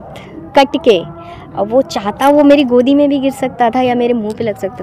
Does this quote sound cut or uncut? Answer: uncut